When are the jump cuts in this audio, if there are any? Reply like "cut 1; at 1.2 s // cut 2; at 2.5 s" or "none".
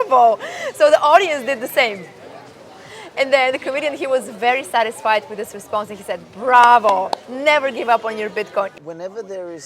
cut 1; at 8.7 s